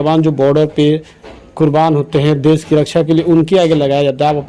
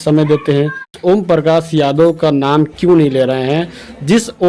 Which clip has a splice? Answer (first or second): second